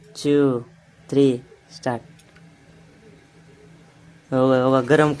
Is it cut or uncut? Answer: uncut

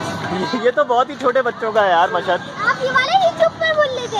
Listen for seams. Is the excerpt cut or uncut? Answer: uncut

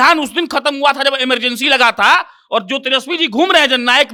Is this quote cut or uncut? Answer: uncut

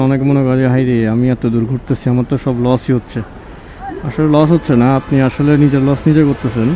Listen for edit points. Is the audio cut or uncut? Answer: uncut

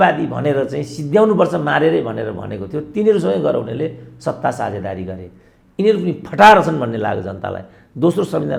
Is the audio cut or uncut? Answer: uncut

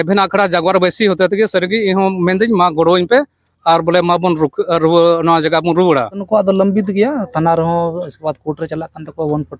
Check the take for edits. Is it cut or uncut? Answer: cut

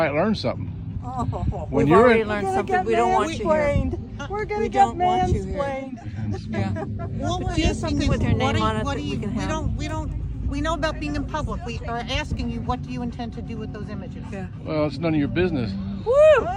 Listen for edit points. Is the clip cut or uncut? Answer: uncut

